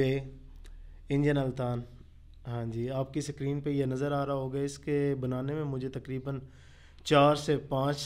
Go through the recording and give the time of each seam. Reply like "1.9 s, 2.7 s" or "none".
none